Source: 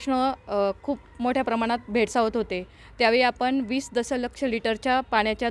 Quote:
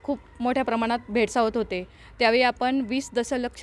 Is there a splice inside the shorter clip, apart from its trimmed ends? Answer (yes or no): no